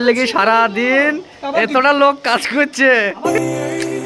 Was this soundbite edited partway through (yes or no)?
yes